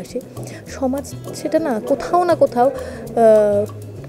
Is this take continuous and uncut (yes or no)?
yes